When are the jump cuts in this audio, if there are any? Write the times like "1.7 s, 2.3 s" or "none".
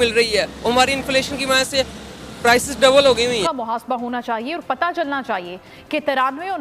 3.4 s

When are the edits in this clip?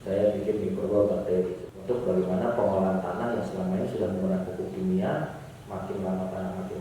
1.6 s

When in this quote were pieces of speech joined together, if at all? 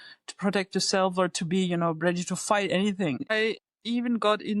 3.3 s

